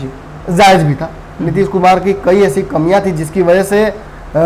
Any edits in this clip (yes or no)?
no